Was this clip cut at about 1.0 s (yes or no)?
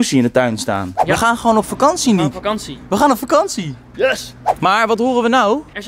yes